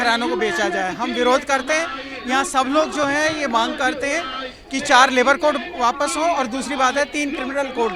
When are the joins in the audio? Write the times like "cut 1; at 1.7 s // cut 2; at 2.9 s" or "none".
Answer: none